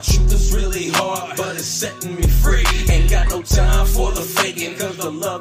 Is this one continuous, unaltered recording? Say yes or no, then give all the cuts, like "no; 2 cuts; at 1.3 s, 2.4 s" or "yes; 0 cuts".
yes; 0 cuts